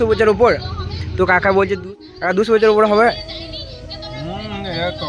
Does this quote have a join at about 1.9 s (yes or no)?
yes